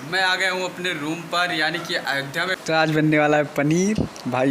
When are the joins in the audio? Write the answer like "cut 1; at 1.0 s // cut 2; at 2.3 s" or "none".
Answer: cut 1; at 2.6 s